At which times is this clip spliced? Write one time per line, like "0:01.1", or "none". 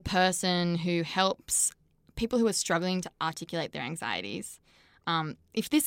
none